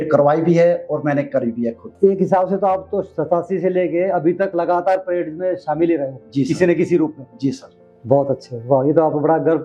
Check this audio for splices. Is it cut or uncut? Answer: uncut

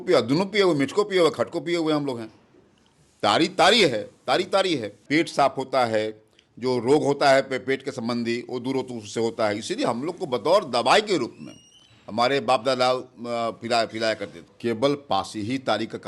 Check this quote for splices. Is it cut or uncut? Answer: cut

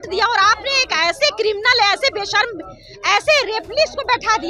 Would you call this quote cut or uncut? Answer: uncut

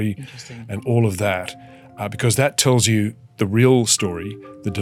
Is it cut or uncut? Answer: uncut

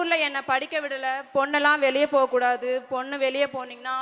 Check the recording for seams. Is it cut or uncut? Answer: uncut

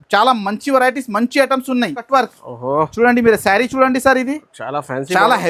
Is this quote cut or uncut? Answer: cut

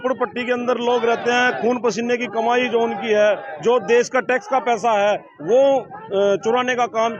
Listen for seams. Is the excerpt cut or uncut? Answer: uncut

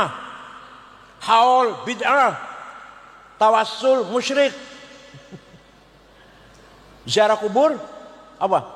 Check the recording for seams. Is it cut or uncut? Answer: uncut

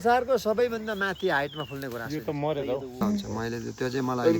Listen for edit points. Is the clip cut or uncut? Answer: cut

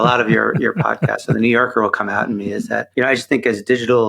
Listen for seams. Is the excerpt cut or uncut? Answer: cut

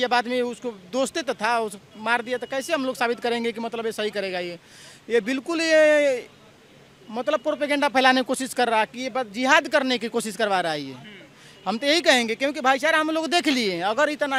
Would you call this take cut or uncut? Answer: uncut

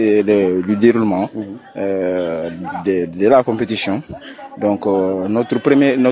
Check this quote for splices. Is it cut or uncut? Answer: uncut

